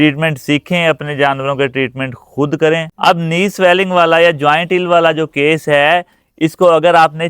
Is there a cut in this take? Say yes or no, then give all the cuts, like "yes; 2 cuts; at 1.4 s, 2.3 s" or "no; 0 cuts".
yes; 1 cut; at 2.9 s